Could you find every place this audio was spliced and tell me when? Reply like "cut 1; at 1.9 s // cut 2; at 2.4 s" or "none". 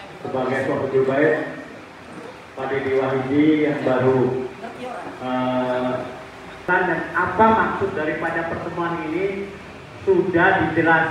cut 1; at 6.7 s